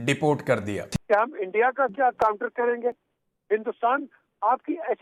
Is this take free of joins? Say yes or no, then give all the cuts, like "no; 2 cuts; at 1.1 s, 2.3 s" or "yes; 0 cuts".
yes; 0 cuts